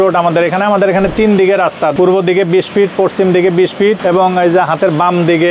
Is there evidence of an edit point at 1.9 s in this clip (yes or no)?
yes